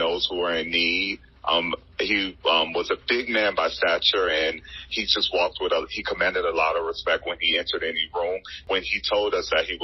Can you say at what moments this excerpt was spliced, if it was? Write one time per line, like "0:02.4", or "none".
0:08.6